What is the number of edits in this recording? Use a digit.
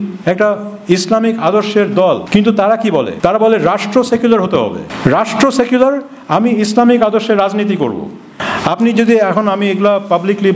4